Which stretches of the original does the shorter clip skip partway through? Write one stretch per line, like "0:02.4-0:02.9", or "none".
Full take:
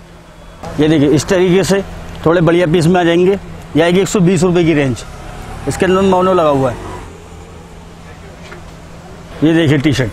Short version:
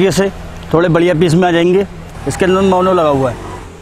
0:03.5-0:05.4